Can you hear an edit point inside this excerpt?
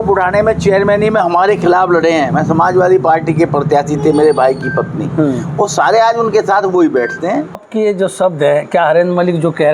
yes; 1 cut; at 7.7 s

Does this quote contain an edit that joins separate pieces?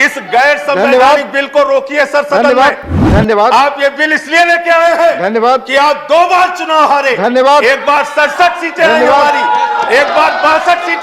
yes; 1 cut; at 3.0 s

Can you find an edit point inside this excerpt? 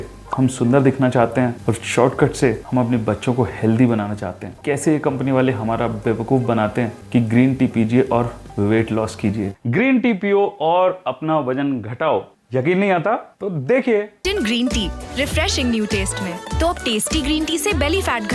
yes; 1 cut; at 4.5 s

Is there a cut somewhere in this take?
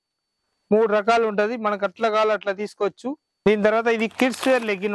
yes; 1 cut; at 3.3 s

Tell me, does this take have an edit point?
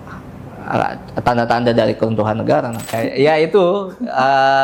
yes; 1 cut; at 2.9 s

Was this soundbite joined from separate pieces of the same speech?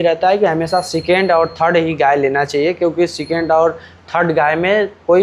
no; 0 cuts

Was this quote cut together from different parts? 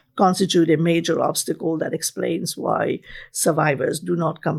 no; 0 cuts

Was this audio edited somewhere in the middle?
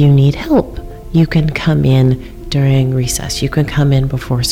no; 0 cuts

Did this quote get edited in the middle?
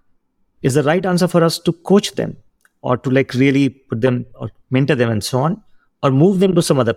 no; 0 cuts

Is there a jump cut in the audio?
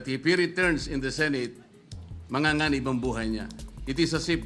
no; 0 cuts

